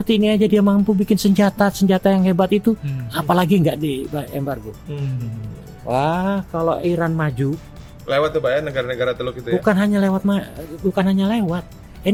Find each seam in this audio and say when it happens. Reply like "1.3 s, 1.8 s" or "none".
none